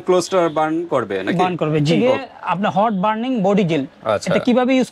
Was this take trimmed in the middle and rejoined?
yes; 1 cut; at 1.9 s

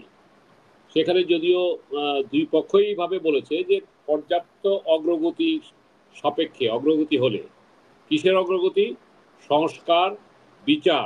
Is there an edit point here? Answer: no; 0 cuts

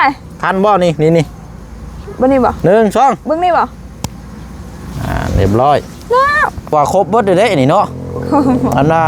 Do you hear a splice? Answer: yes; 1 cut; at 6.7 s

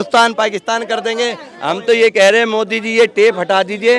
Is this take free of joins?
no; 1 cut; at 1.5 s

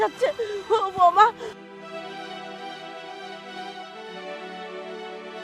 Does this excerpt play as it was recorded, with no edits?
no; 1 cut; at 1.6 s

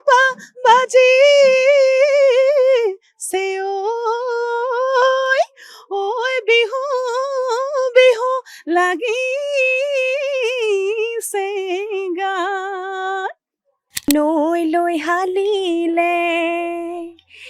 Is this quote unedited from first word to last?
no; 1 cut; at 14.1 s

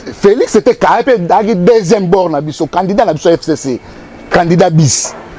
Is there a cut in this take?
no; 0 cuts

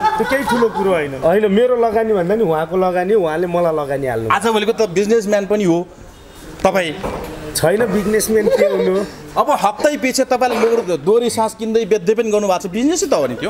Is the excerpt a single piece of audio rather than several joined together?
no; 1 cut; at 1.1 s

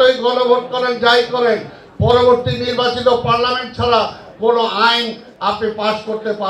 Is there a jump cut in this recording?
no; 0 cuts

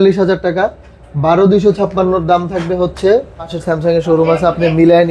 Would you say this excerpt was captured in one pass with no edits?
no; 1 cut; at 3.5 s

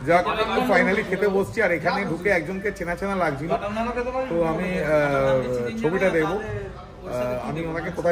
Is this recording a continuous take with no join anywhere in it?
yes; 0 cuts

